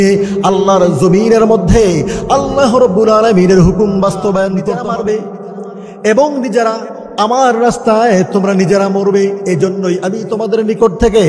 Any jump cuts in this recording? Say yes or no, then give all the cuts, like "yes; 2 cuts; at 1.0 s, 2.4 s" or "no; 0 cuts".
yes; 1 cut; at 4.6 s